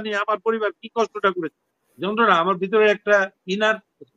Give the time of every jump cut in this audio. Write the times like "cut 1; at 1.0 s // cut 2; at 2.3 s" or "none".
cut 1; at 2.0 s